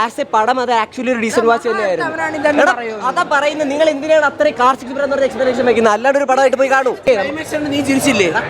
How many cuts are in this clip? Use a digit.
1